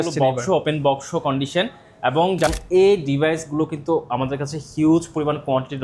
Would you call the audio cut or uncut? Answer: cut